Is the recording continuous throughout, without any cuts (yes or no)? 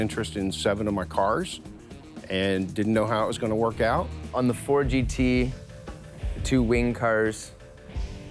no